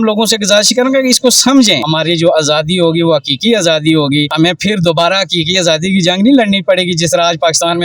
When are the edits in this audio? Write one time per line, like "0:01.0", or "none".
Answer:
0:01.8